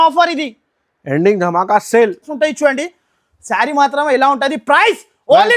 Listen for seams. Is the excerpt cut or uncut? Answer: cut